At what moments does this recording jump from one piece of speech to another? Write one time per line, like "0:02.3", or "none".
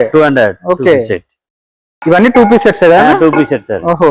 none